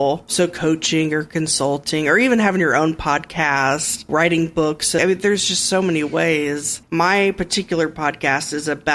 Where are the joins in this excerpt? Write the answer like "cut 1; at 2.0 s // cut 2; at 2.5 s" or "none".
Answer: cut 1; at 4.1 s // cut 2; at 5.0 s // cut 3; at 6.8 s